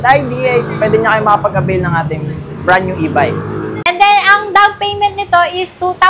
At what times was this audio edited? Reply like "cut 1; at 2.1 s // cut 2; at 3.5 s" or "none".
cut 1; at 3.9 s